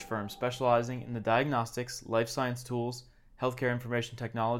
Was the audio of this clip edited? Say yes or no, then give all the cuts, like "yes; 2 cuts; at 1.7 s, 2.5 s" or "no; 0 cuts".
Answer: no; 0 cuts